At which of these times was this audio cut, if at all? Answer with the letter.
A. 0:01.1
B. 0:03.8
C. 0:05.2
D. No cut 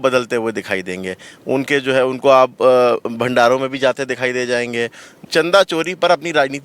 C